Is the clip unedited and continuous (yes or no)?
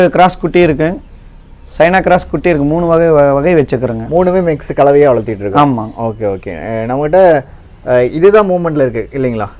yes